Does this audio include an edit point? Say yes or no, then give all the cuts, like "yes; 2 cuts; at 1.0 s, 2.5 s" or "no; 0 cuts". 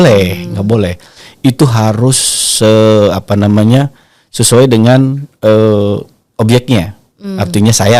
no; 0 cuts